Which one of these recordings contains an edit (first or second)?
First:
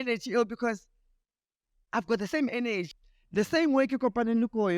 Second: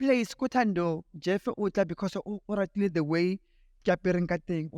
first